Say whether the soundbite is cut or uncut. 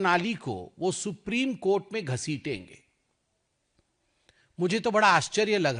uncut